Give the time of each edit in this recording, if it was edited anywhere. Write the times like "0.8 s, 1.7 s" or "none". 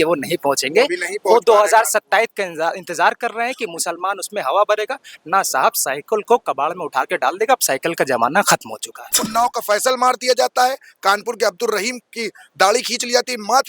9.3 s